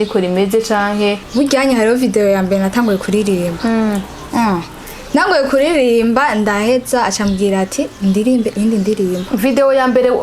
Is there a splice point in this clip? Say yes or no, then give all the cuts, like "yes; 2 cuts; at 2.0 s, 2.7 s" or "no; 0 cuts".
yes; 1 cut; at 1.2 s